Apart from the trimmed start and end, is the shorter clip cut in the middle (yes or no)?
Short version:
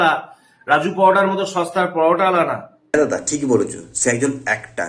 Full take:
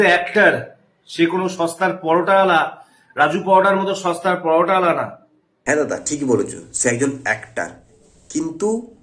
yes